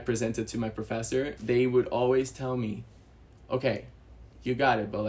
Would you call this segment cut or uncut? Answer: cut